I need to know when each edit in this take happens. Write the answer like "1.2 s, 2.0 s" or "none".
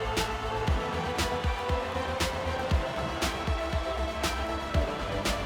none